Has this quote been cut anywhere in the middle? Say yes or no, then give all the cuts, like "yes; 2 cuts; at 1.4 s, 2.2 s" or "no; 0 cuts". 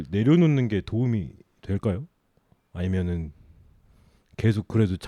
no; 0 cuts